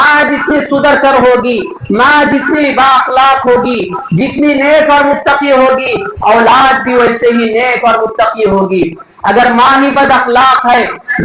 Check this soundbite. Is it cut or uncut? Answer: uncut